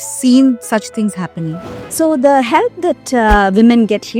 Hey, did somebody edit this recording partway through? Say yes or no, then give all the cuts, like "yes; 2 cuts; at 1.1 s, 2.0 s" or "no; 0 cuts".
yes; 1 cut; at 1.6 s